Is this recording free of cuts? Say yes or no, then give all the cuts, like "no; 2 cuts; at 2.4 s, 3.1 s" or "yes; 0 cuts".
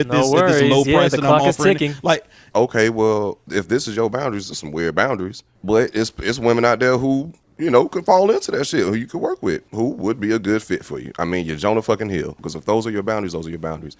no; 2 cuts; at 2.4 s, 12.4 s